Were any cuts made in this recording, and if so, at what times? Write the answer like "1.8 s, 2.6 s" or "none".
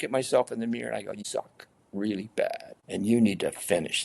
1.2 s, 2.7 s